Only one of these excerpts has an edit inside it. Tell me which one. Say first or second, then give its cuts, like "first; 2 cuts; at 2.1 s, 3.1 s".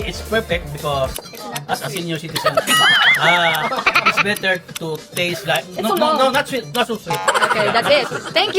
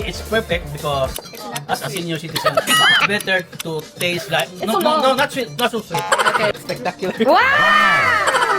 second; 2 cuts; at 3.0 s, 6.5 s